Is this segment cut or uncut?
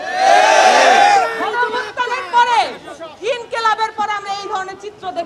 uncut